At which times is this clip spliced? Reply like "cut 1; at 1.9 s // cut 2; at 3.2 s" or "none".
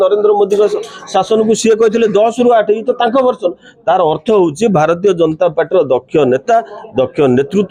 none